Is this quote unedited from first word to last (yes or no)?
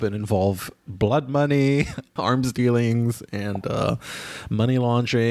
no